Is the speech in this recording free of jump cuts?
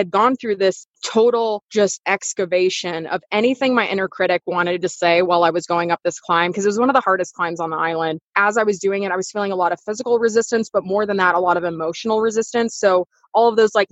no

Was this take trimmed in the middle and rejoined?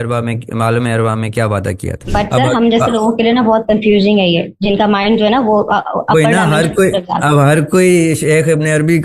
yes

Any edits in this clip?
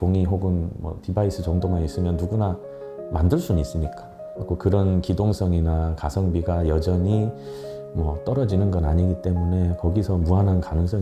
no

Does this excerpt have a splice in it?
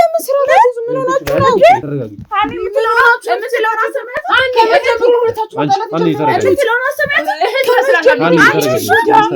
no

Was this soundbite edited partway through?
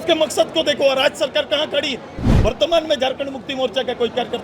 yes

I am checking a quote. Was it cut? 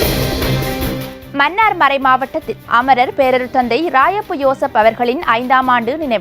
no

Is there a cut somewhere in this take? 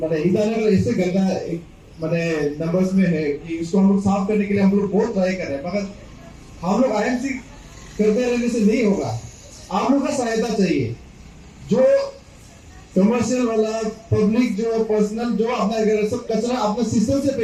no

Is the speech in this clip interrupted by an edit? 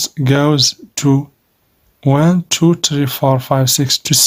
no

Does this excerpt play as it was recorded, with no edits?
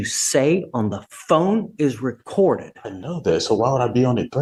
yes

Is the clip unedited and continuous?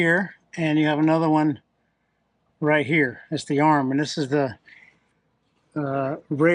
yes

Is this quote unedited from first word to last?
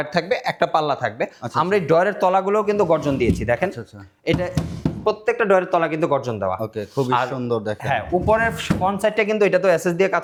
yes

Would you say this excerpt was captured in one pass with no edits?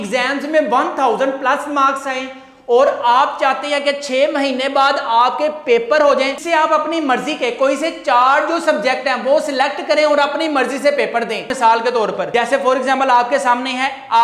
no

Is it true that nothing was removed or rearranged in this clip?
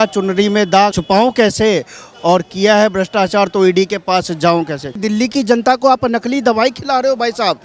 no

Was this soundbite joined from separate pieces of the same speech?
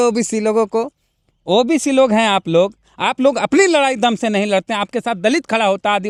no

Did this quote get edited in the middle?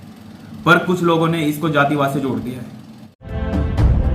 yes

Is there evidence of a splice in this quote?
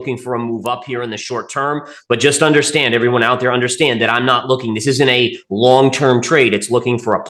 no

